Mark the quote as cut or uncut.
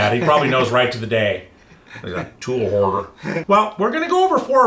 cut